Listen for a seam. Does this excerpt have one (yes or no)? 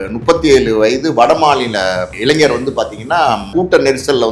yes